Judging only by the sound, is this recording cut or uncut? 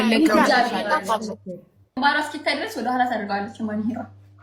cut